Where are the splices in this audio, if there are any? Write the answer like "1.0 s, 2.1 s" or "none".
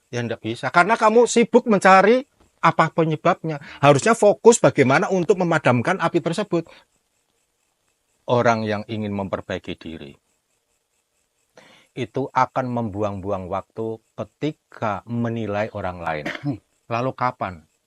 6.8 s, 16.7 s